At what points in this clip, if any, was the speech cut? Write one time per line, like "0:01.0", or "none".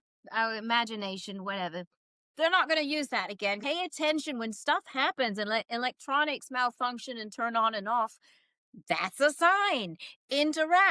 0:03.6

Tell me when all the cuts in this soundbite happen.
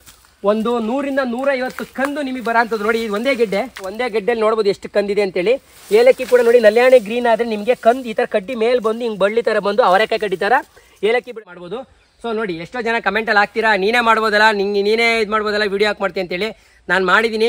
0:04.0
0:11.4

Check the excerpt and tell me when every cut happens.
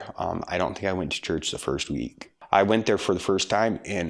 0:02.3

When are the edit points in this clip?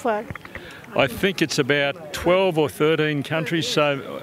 none

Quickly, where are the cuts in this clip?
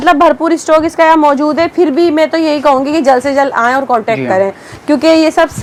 none

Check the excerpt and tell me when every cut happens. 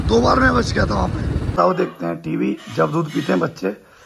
0:01.4

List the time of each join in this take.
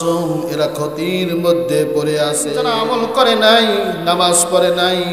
0:02.7

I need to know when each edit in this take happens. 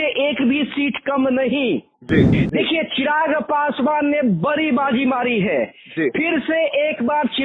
0:02.4

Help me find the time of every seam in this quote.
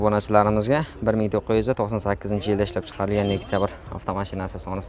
none

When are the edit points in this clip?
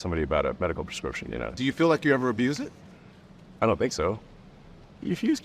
0:01.5

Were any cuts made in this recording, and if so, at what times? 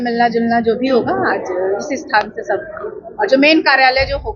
none

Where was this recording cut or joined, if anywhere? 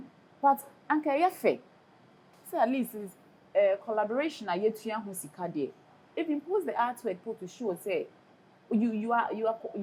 none

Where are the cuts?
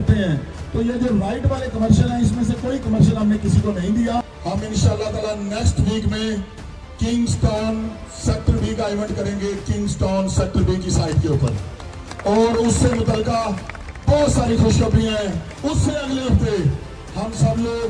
0:04.3
0:15.5

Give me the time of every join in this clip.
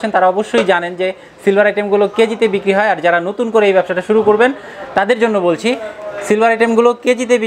none

